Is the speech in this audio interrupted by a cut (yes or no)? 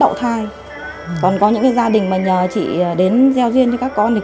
no